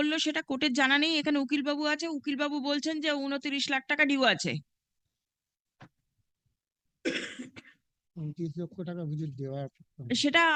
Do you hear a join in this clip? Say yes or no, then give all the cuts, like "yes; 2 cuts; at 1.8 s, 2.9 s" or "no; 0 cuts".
no; 0 cuts